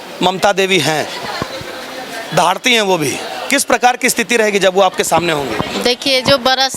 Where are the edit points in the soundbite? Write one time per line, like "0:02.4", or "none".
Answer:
none